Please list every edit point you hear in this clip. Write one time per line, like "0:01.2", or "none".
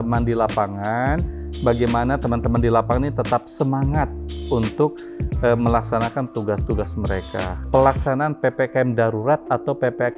0:07.6